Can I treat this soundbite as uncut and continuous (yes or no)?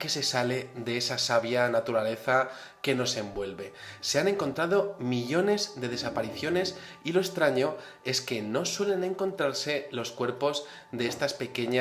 yes